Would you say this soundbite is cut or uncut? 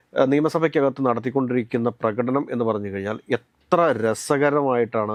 uncut